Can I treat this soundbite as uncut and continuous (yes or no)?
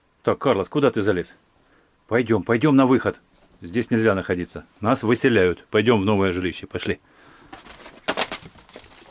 yes